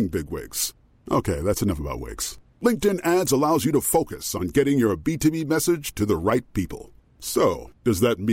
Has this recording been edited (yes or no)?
no